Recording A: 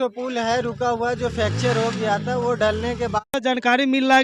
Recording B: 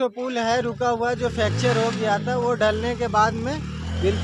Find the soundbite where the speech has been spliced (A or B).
A